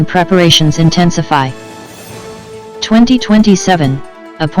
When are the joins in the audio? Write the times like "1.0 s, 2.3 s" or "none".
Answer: 1.6 s, 2.9 s